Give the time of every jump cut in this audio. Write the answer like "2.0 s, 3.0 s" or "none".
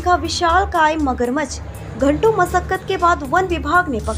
none